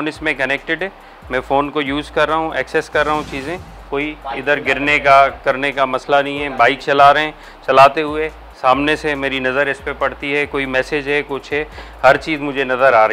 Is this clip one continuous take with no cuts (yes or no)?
yes